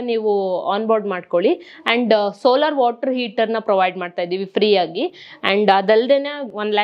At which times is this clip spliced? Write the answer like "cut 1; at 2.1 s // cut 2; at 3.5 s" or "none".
none